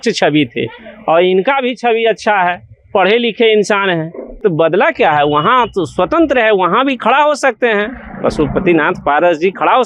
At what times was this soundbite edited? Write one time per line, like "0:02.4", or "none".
0:04.2